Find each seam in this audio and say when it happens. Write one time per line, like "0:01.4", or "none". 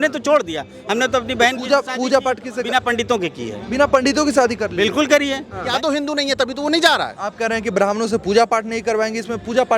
0:05.7